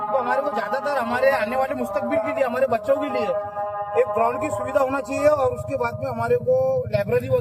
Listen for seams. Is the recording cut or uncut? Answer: uncut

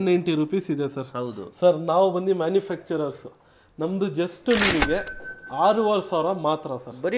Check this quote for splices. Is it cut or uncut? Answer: uncut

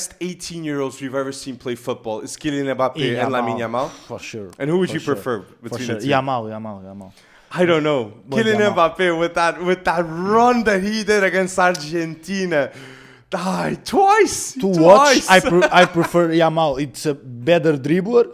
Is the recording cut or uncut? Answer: uncut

